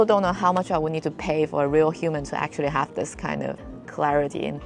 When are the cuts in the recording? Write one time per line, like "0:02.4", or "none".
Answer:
0:03.6

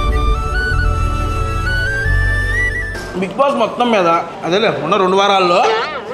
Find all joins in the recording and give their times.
0:02.9
0:04.3

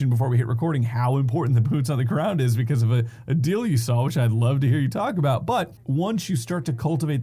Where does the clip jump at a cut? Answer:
0:05.8

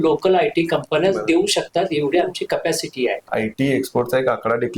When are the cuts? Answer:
0:03.3

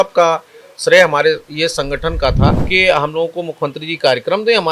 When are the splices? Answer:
0:02.6

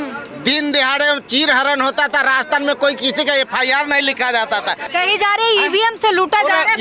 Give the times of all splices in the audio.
none

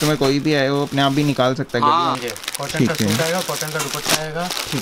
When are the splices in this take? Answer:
0:02.1

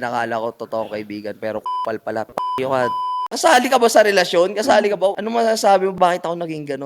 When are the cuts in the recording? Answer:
0:03.3

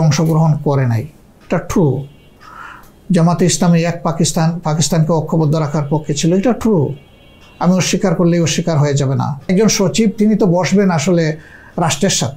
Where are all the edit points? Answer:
0:09.4

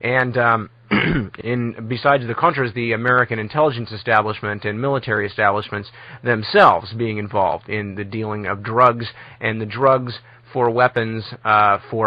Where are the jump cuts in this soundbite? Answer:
none

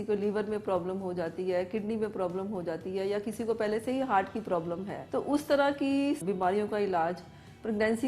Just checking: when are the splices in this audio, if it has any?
0:05.0
0:06.2

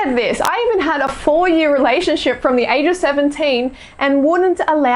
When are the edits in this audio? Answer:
none

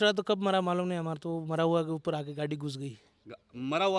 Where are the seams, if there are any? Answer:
none

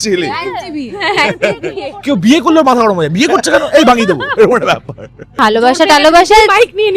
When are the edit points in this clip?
0:05.3

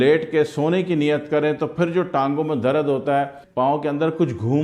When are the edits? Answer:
0:03.4

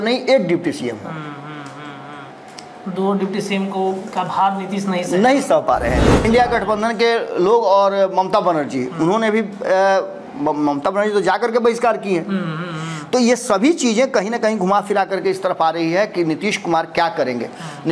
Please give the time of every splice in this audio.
0:06.2

